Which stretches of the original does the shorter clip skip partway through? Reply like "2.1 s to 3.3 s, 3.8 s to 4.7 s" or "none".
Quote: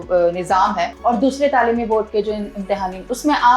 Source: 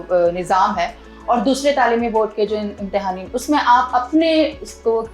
0.9 s to 1.1 s